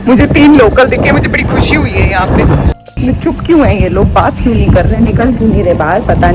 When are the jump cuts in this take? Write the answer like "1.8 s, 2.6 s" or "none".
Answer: 2.8 s